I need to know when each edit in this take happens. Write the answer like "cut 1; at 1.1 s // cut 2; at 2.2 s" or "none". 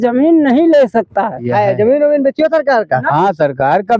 cut 1; at 1.5 s